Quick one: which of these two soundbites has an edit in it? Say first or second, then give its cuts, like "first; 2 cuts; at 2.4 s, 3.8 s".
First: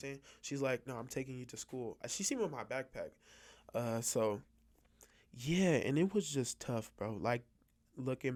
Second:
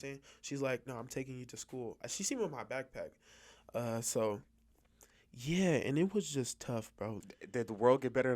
second; 1 cut; at 7.2 s